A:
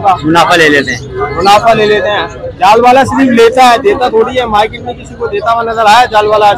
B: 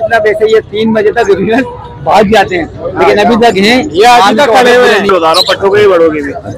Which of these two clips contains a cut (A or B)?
B